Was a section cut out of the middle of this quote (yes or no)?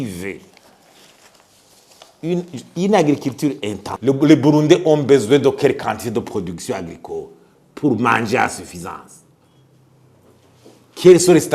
yes